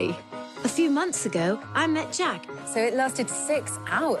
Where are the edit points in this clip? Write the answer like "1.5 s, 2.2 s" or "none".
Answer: none